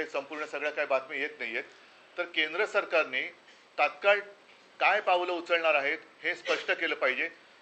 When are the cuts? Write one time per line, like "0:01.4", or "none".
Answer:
none